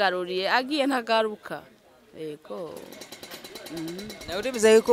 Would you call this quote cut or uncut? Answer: uncut